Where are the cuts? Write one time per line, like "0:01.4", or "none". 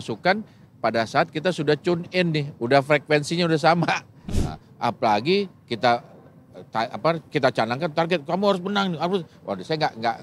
0:04.2

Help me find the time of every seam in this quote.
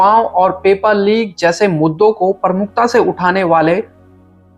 none

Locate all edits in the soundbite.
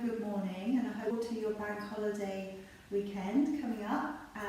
0:01.1

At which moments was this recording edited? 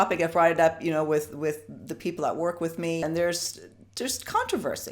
0:03.0

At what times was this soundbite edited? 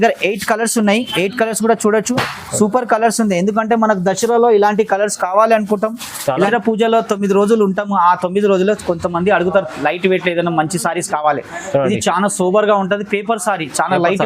0:06.5

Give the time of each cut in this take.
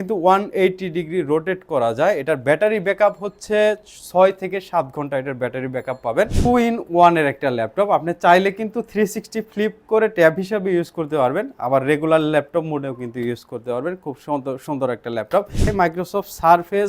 0:06.4
0:15.6

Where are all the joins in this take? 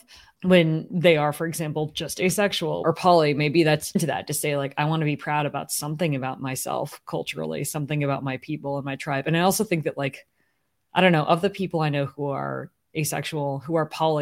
0:02.8
0:04.0

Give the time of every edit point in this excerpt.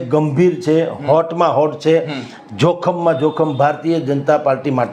none

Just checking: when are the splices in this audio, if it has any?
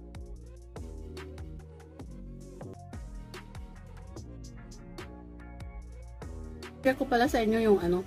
0:02.7
0:06.8

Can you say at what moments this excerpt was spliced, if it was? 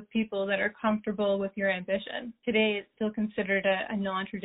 0:02.3
0:02.9

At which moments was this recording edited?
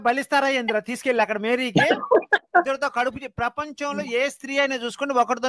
none

